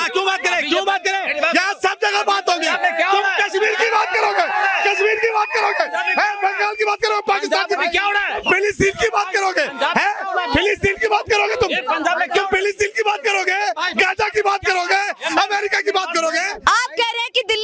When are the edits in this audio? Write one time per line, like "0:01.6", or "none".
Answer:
0:16.5